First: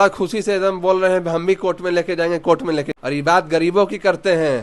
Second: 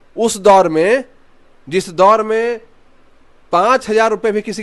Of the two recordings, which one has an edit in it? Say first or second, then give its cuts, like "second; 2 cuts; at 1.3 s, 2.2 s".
first; 1 cut; at 2.9 s